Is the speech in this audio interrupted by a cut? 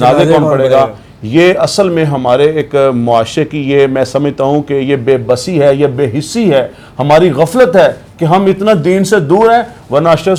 no; 0 cuts

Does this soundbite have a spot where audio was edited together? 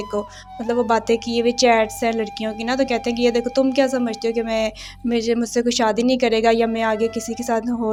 no; 0 cuts

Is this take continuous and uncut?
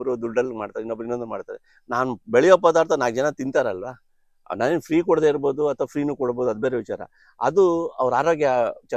yes; 0 cuts

